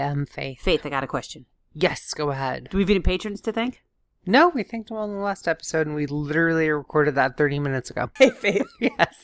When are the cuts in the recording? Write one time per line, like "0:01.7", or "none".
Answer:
0:08.0